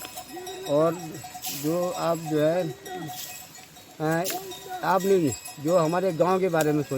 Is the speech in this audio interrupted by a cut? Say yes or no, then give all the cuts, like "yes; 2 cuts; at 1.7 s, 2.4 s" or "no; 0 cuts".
no; 0 cuts